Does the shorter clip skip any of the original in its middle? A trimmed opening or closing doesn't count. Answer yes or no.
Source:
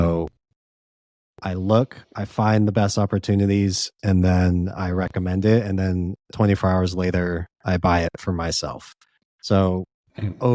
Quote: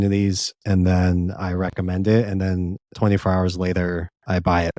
no